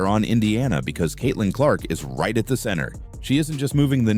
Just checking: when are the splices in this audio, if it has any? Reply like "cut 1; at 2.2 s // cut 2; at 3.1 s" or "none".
none